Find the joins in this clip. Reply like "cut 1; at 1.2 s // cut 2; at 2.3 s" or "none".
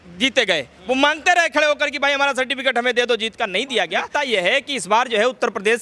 cut 1; at 4.0 s